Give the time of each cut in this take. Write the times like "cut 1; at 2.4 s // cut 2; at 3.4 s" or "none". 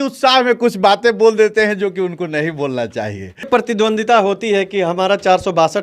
cut 1; at 3.5 s

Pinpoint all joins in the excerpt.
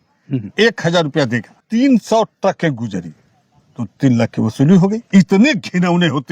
cut 1; at 1.6 s // cut 2; at 5.0 s

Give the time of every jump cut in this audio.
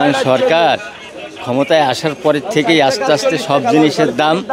none

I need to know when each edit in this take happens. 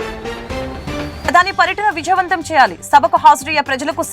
cut 1; at 1.2 s

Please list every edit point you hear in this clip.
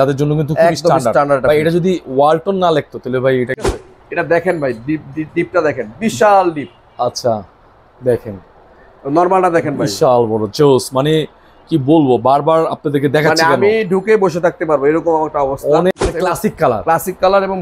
cut 1; at 3.7 s // cut 2; at 15.9 s

